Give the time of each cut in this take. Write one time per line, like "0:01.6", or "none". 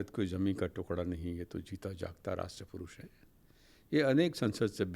none

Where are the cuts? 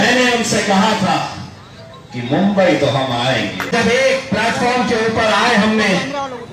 0:03.7

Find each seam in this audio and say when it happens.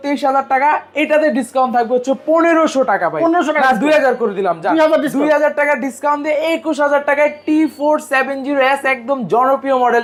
none

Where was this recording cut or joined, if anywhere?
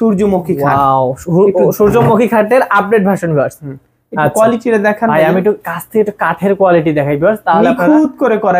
none

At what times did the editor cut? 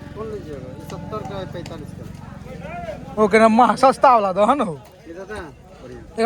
none

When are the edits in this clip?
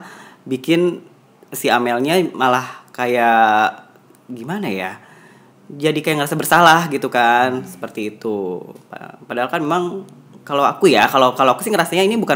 none

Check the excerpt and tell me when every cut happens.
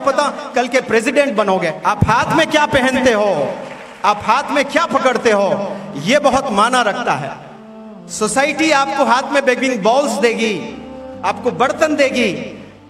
0:01.8

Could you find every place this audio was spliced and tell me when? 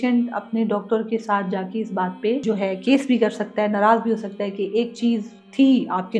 0:02.4

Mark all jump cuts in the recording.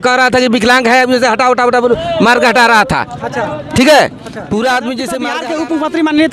0:05.4

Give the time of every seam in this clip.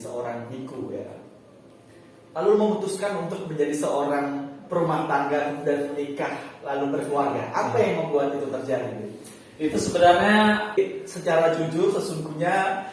0:10.8

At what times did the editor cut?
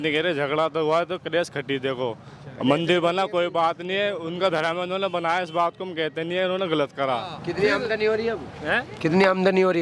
0:07.4

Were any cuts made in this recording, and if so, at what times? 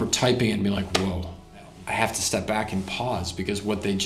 0:01.7

